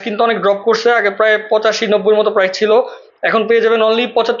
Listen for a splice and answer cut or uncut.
uncut